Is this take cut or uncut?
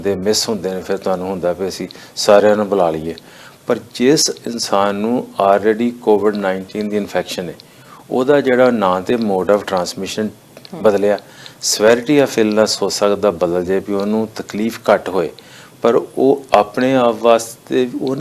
uncut